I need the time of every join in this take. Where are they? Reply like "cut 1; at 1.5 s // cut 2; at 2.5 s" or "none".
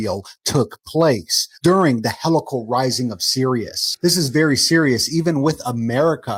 none